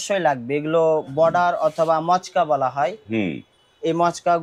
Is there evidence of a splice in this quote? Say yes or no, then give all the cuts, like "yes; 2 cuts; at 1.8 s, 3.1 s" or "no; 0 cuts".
no; 0 cuts